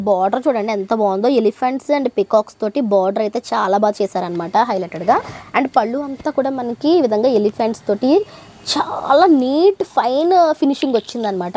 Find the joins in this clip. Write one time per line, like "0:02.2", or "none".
none